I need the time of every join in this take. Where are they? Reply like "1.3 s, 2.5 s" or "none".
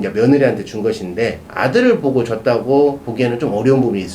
1.4 s